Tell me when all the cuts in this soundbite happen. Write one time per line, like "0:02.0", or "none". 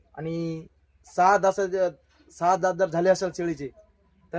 none